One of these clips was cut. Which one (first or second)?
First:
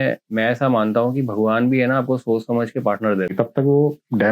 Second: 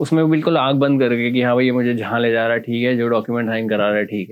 first